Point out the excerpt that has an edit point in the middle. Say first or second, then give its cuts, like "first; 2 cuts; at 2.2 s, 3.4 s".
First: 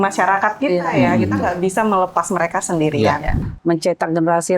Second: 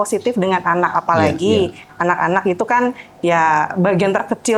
first; 1 cut; at 3.5 s